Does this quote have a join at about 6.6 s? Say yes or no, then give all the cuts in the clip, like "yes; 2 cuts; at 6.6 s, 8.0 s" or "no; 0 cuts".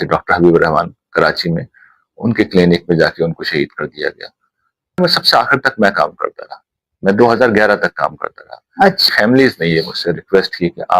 no; 2 cuts; at 5.0 s, 9.0 s